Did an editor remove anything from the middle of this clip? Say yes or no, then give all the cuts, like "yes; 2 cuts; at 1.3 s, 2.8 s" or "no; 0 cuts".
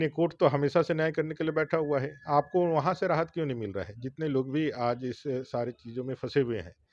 no; 0 cuts